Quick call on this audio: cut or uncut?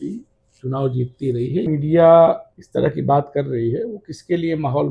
cut